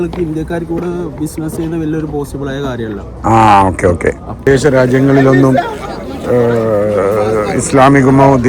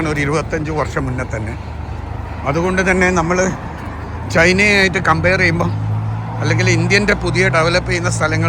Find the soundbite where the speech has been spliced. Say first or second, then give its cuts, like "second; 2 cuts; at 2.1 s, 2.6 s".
first; 1 cut; at 4.4 s